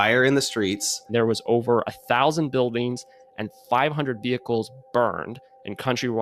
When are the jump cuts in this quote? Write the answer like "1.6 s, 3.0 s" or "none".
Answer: 1.1 s